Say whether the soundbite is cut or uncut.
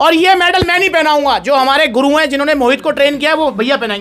uncut